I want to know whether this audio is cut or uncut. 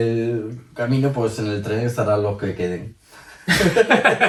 uncut